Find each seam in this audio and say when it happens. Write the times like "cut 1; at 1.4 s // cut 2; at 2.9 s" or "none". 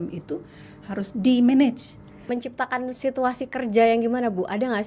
cut 1; at 2.1 s